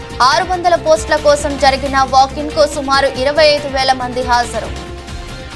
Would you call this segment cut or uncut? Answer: uncut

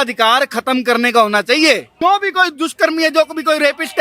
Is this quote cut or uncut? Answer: cut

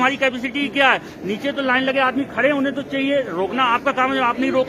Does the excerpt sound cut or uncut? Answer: uncut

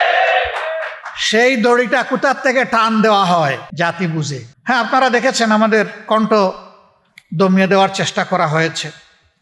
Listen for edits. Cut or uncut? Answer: cut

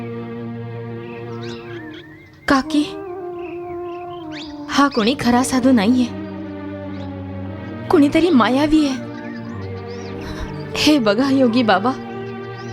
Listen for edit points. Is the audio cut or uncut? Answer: cut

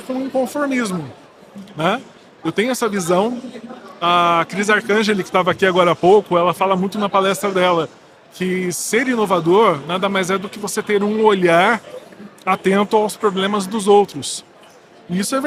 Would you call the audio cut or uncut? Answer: uncut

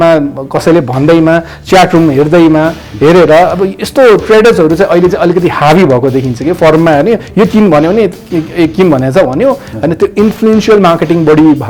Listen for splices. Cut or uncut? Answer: uncut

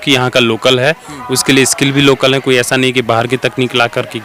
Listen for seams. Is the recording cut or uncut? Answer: uncut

